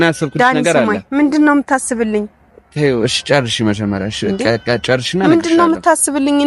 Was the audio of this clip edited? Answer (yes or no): no